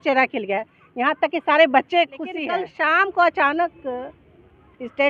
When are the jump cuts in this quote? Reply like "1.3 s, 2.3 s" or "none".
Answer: 2.4 s